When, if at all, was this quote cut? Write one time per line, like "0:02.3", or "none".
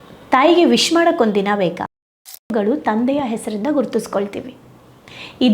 0:02.5

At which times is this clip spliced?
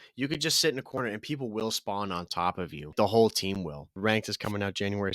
0:02.9
0:03.9

